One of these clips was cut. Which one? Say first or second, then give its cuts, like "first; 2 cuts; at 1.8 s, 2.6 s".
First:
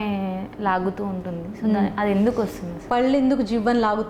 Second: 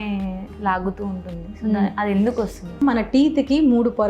second; 1 cut; at 2.8 s